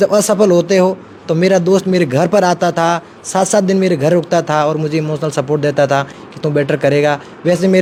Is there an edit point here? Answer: no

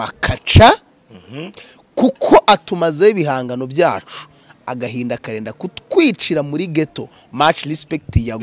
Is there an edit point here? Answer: no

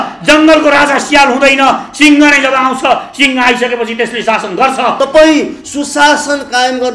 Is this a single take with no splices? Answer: no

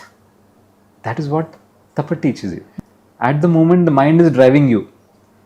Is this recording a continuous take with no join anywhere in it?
no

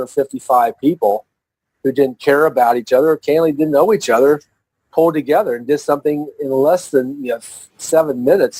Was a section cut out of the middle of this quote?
no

